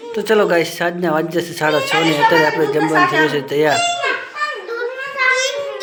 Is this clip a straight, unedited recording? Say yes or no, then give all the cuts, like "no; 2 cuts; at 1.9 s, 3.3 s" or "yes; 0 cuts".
yes; 0 cuts